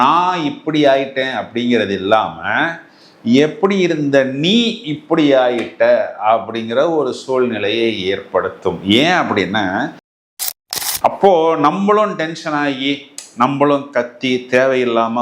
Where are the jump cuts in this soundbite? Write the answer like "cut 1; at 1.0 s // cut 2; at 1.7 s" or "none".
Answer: cut 1; at 10.4 s